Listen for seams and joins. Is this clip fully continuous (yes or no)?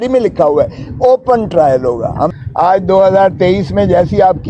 no